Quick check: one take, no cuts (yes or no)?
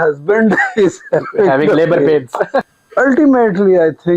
no